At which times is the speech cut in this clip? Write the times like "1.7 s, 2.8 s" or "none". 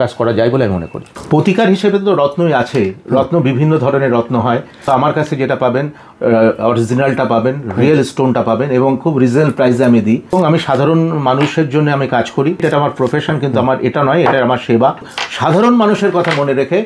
1.2 s, 4.8 s, 10.3 s, 12.6 s, 15.1 s